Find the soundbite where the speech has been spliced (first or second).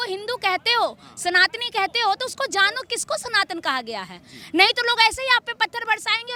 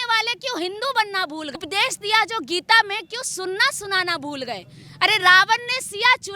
second